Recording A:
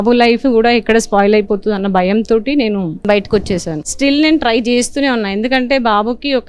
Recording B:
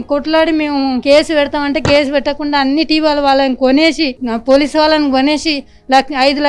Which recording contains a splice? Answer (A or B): A